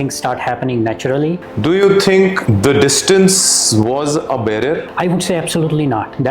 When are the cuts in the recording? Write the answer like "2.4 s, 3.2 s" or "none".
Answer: 1.5 s, 2.4 s, 4.9 s